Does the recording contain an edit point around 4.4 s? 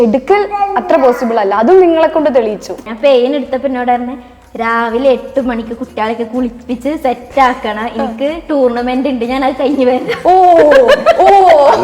no; 1 cut; at 2.8 s

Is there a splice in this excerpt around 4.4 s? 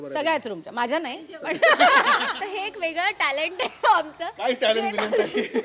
no; 1 cut; at 2.3 s

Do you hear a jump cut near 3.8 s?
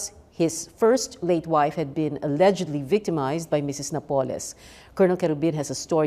yes; 1 cut; at 3.8 s

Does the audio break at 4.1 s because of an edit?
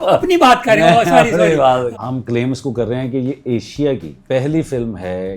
yes; 2 cuts; at 1.9 s, 4.1 s

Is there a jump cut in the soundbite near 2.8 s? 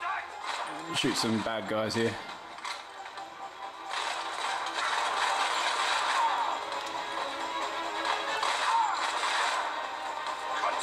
no; 1 cut; at 9.2 s

